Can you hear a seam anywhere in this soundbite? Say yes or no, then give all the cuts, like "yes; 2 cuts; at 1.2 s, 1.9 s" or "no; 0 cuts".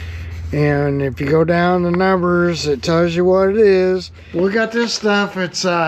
yes; 1 cut; at 4.2 s